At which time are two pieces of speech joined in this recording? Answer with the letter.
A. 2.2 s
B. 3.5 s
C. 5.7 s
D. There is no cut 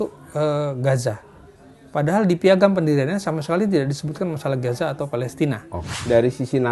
C